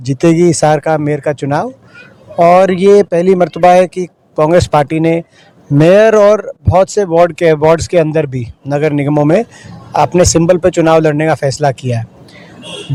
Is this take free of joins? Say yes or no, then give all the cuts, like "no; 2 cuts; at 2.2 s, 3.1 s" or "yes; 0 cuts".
yes; 0 cuts